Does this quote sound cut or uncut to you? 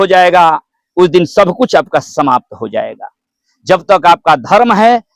uncut